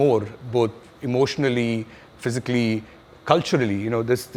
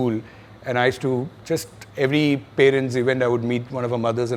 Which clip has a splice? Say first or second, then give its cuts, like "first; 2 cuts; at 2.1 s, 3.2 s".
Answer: second; 1 cut; at 1.8 s